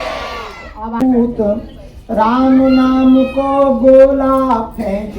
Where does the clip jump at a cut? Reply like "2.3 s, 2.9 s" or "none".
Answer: 1.0 s

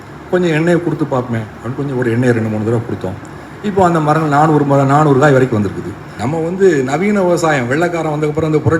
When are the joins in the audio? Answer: 6.1 s

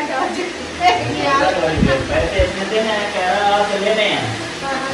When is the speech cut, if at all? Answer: none

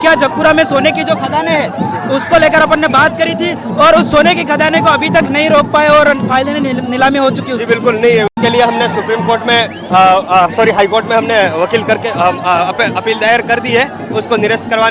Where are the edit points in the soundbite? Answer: none

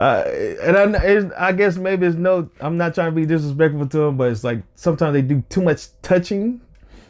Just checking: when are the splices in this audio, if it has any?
none

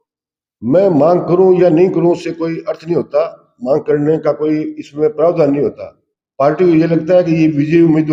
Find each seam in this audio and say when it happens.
none

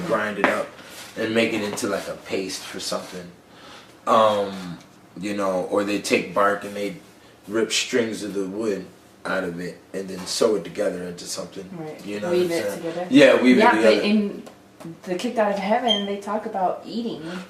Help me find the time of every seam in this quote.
15.0 s

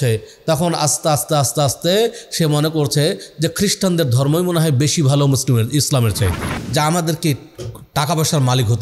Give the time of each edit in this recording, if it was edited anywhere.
6.6 s

